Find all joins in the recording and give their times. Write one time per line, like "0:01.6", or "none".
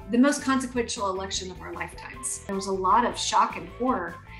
0:02.5

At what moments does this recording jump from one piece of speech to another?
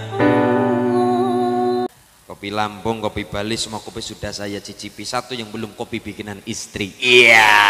0:01.9

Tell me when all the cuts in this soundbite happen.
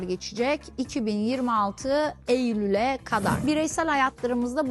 0:03.4

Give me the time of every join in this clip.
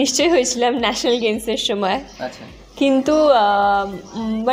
none

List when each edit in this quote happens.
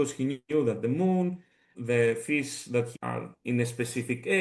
0:01.7
0:02.9

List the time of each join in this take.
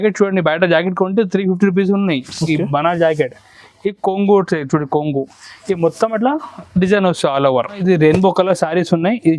0:07.8

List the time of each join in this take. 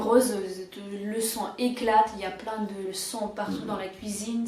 none

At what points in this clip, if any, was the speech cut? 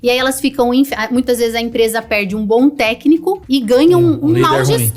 0:03.4

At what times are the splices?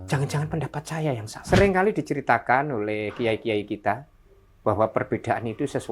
0:01.3

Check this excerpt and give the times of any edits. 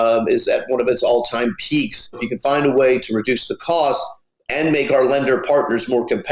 0:02.3

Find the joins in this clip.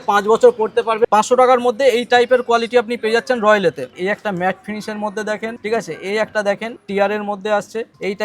0:01.0
0:03.9

